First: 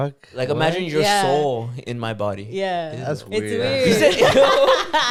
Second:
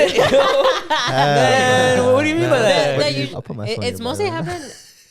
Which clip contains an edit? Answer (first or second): second